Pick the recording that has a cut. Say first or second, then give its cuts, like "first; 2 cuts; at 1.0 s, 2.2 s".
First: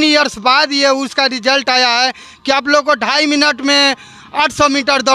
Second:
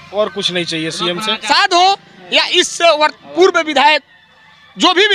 second; 1 cut; at 1.4 s